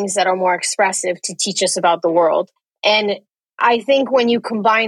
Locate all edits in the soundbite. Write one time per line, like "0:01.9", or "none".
0:02.6